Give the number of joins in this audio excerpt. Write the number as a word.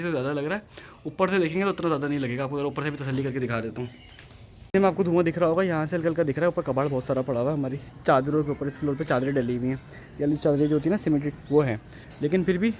zero